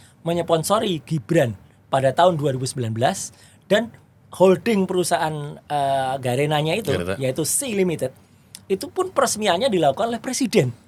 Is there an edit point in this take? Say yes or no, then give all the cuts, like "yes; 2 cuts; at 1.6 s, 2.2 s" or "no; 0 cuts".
no; 0 cuts